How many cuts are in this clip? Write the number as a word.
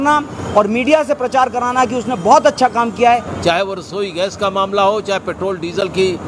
one